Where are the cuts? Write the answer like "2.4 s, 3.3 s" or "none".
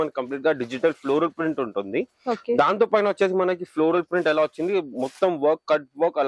none